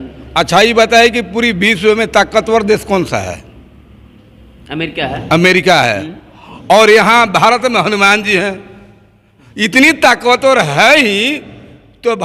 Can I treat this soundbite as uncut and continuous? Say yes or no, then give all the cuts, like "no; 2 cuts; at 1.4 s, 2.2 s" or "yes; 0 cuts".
yes; 0 cuts